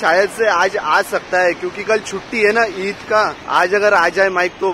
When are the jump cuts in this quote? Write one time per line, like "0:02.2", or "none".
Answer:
0:03.4